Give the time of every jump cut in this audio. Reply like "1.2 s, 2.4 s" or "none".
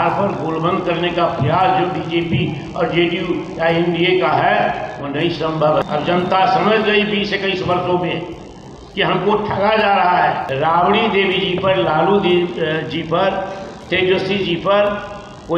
5.8 s, 10.5 s